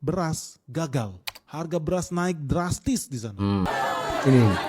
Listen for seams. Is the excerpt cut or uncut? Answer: cut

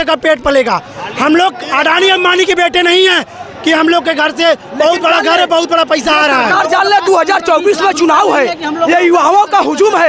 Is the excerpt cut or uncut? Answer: uncut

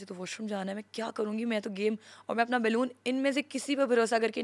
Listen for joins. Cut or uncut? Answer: uncut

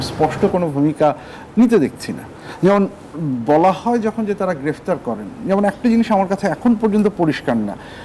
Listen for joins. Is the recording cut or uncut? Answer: uncut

